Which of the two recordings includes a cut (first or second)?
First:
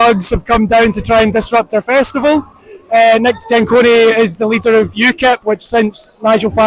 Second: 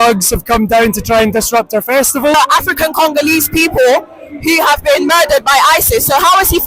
second